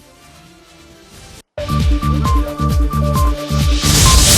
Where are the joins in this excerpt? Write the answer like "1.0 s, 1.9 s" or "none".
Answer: 1.0 s